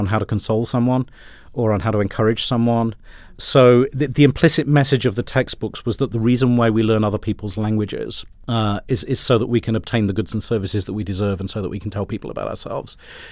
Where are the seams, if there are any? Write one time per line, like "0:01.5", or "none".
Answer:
none